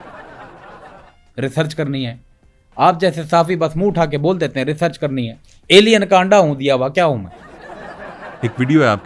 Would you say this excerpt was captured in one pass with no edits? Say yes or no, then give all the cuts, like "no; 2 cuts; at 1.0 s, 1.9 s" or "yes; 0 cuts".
no; 1 cut; at 1.0 s